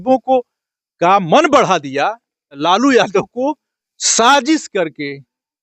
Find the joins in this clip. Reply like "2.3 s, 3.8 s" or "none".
2.7 s